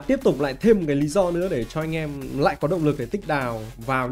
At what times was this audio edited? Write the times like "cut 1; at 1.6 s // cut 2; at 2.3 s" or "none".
none